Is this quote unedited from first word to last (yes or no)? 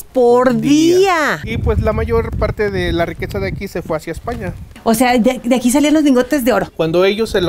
no